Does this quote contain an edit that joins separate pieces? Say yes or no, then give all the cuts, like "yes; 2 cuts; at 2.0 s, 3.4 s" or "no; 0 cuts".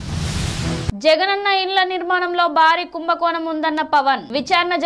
no; 0 cuts